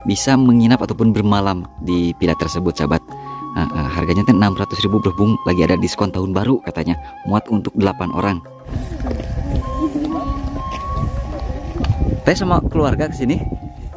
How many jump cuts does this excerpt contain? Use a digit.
1